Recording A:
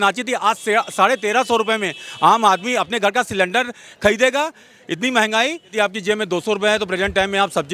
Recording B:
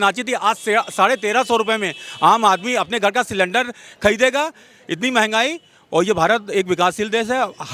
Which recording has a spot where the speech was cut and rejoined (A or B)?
A